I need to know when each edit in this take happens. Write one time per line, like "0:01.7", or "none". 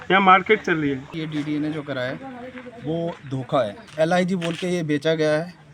0:01.1
0:03.8